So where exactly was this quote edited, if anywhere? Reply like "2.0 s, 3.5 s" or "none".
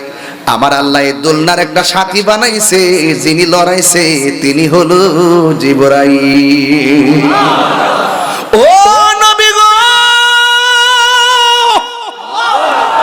none